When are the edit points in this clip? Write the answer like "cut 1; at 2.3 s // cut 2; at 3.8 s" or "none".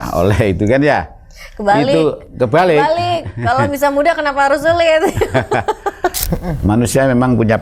cut 1; at 6.2 s